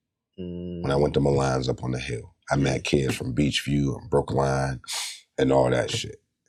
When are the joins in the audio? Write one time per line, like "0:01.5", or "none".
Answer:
none